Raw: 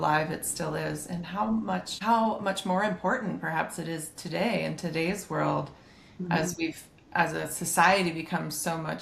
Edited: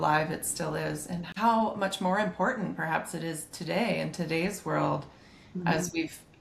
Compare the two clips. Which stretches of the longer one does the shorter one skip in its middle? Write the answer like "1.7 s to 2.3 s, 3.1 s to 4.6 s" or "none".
1.3 s to 1.9 s